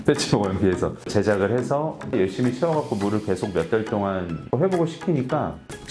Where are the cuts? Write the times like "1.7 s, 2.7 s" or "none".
2.1 s